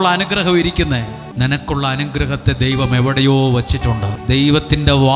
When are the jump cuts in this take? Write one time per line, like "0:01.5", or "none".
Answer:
0:01.2
0:04.1